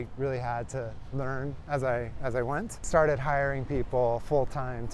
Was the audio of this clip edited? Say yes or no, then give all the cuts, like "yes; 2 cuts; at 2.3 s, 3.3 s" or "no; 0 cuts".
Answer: yes; 1 cut; at 2.8 s